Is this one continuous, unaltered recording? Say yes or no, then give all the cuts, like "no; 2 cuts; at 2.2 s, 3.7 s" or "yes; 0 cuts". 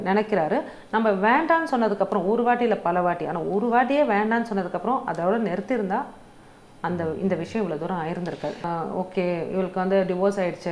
no; 1 cut; at 8.6 s